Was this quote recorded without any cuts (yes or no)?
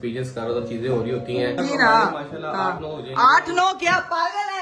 no